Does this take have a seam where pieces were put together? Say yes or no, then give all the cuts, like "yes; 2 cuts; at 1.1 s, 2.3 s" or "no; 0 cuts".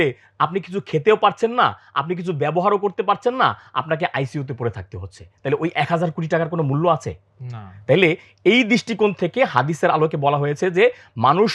no; 0 cuts